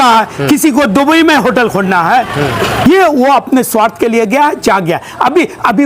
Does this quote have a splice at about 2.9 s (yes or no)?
yes